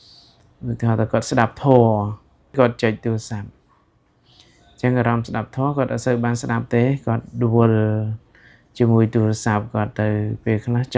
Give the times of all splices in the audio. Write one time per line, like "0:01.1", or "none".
0:02.6

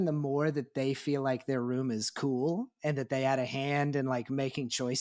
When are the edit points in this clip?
none

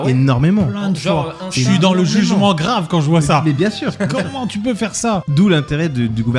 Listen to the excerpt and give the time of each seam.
0:05.2

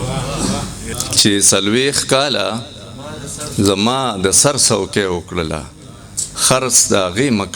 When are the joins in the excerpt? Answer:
0:00.9

